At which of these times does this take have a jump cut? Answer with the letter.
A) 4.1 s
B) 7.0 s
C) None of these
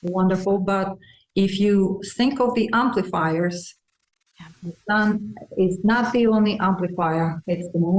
B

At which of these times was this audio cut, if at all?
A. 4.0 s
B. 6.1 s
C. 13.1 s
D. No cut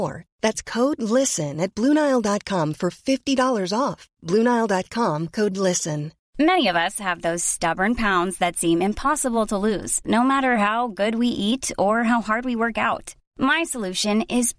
B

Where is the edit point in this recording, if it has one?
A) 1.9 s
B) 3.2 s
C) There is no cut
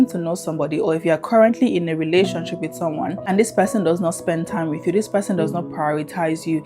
B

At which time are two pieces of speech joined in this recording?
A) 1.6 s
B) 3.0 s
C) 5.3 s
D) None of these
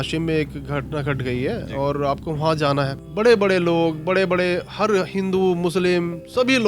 B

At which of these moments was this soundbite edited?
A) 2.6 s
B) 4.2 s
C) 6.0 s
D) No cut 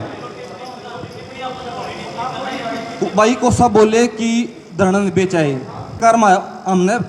C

